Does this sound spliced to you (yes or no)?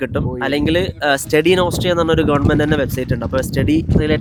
no